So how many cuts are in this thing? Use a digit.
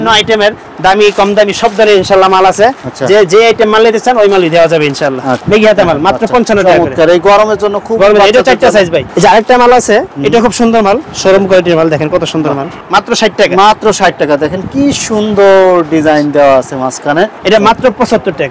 4